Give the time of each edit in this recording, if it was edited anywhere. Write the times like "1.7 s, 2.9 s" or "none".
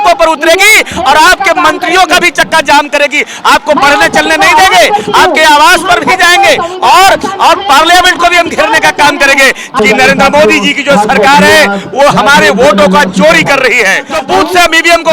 9.8 s, 14.1 s